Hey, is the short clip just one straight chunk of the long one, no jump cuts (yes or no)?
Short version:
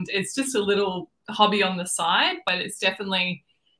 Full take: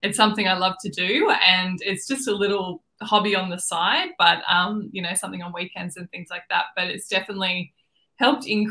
no